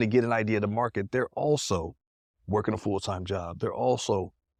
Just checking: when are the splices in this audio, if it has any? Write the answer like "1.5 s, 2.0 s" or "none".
none